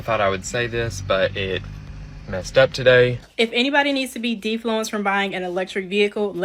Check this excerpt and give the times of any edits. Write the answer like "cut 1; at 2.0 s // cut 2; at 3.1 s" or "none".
cut 1; at 3.2 s

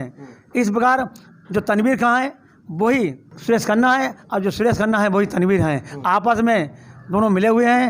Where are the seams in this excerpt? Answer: none

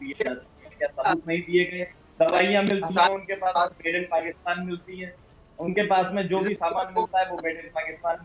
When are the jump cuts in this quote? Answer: none

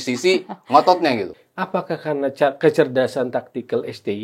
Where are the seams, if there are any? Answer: cut 1; at 1.3 s

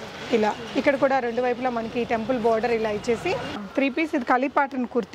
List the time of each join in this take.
cut 1; at 3.6 s

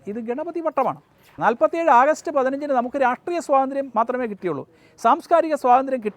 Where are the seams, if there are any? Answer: cut 1; at 1.3 s

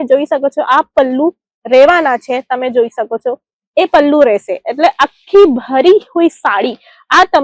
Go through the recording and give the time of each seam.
none

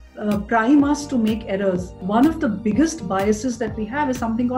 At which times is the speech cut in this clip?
cut 1; at 1.9 s

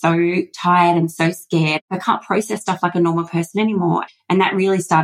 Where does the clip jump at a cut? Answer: cut 1; at 1.8 s // cut 2; at 4.0 s

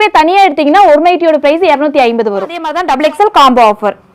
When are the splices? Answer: cut 1; at 2.7 s

